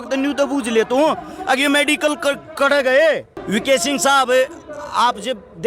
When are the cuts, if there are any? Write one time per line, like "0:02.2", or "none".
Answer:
0:03.4